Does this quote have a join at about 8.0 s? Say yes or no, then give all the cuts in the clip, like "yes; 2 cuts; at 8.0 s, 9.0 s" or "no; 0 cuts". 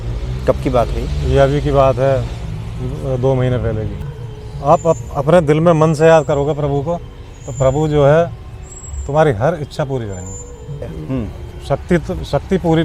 no; 2 cuts; at 4.0 s, 10.9 s